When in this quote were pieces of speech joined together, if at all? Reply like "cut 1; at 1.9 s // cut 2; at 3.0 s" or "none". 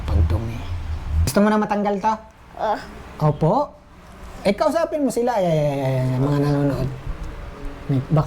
cut 1; at 1.3 s